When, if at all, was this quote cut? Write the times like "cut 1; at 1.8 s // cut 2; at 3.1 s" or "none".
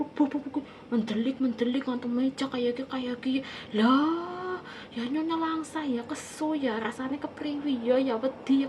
none